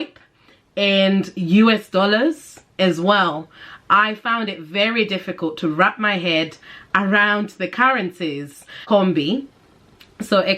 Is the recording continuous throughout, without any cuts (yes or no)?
no